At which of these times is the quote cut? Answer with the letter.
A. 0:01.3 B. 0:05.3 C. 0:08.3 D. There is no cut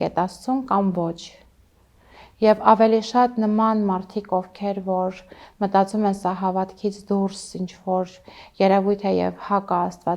D